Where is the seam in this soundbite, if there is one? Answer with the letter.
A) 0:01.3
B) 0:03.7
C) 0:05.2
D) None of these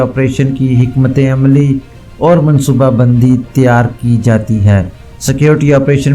D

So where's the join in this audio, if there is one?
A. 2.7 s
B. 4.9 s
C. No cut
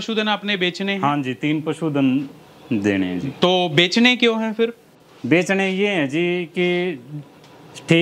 C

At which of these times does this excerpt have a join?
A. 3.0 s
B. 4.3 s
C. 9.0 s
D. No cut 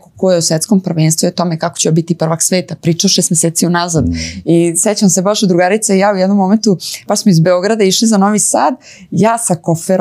D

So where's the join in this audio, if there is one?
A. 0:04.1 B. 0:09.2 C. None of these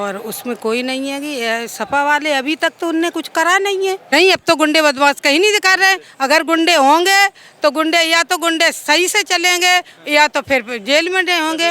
A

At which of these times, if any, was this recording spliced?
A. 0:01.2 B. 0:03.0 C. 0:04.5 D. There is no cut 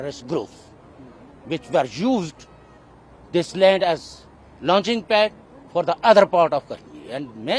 D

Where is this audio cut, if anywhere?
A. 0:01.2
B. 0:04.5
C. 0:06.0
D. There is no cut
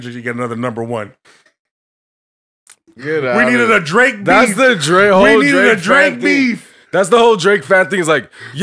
D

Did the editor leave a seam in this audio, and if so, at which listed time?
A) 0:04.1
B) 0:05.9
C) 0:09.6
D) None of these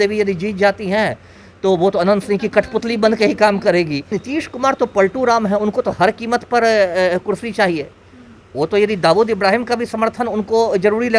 A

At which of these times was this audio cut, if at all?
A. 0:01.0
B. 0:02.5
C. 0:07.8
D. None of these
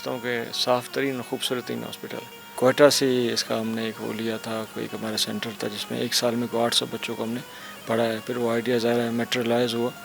B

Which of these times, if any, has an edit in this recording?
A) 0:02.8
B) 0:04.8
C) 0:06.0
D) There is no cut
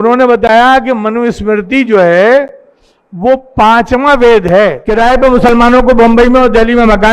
B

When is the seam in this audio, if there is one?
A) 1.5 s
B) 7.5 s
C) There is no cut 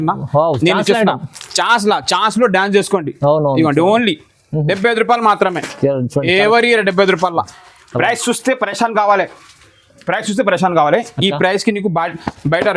B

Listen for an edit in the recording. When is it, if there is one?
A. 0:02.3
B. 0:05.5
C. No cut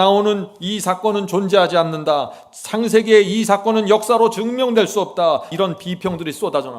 B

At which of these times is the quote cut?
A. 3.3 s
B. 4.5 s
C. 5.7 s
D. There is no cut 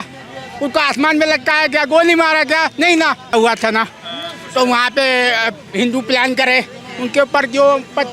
A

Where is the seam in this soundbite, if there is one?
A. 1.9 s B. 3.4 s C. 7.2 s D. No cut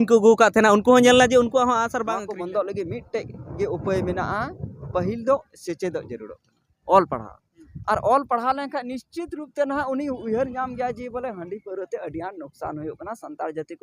A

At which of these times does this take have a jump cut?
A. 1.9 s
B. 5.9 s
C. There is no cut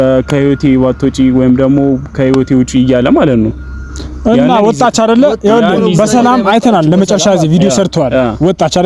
C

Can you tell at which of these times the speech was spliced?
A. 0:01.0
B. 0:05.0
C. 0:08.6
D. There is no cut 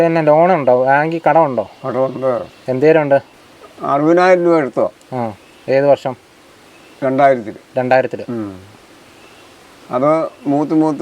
D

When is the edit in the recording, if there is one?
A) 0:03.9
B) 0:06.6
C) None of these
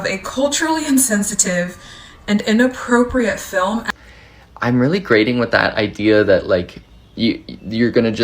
A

